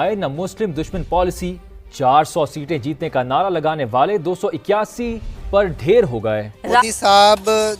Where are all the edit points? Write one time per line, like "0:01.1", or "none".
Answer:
0:06.8

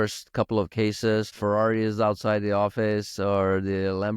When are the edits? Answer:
0:01.3

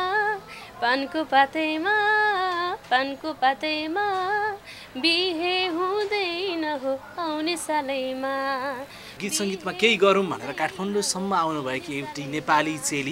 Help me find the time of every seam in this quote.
0:09.2

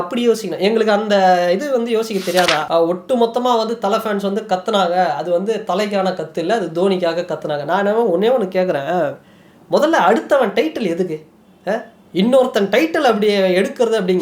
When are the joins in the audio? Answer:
0:02.6

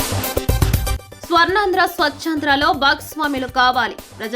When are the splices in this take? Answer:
0:01.1

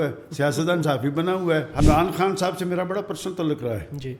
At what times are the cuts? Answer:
0:01.8

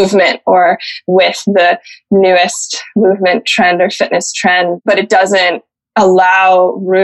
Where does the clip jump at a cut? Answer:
0:04.8

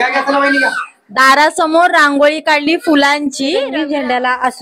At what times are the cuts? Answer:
0:03.6

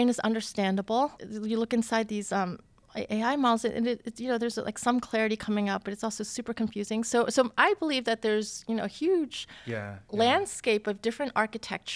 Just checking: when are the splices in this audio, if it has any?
0:01.3

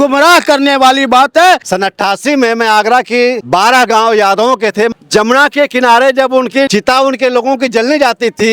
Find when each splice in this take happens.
0:01.6
0:03.4
0:04.9
0:06.7

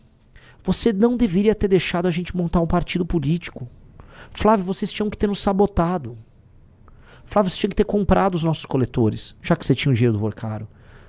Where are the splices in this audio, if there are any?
none

